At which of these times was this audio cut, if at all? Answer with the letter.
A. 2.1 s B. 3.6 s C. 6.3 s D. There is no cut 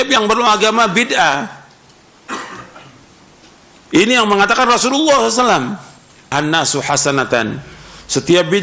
C